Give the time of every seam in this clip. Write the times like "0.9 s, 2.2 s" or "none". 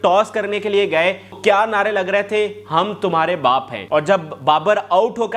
1.4 s, 3.8 s